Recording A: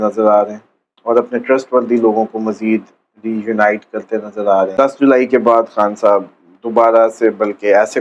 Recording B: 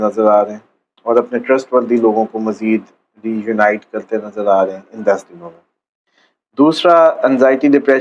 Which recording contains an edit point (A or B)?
A